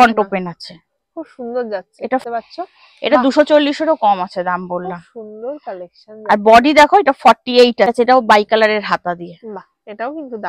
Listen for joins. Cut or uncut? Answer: cut